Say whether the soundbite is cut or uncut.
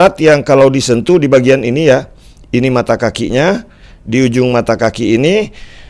uncut